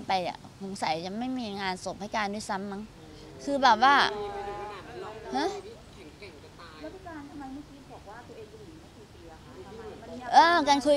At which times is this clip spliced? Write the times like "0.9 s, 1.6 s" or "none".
none